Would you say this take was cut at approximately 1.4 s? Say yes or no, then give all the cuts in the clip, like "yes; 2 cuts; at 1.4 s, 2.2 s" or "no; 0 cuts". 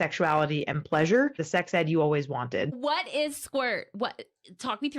yes; 2 cuts; at 1.4 s, 2.7 s